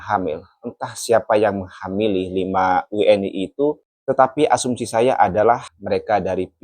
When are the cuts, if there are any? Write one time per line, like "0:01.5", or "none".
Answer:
0:03.9
0:05.7